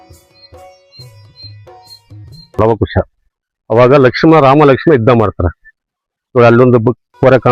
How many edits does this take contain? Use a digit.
1